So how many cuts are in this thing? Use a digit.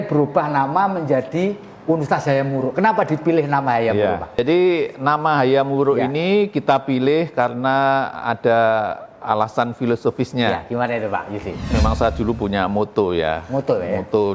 2